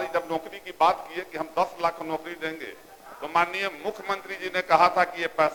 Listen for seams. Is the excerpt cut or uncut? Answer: uncut